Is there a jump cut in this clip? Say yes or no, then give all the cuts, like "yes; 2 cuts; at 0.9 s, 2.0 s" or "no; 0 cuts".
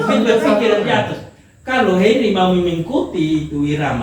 no; 0 cuts